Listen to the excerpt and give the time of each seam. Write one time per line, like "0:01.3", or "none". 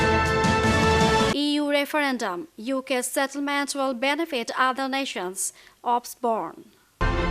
none